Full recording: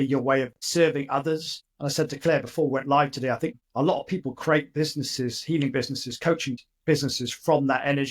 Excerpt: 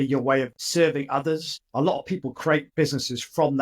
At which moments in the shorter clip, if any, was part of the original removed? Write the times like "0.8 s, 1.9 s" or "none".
1.6 s, 2.7 s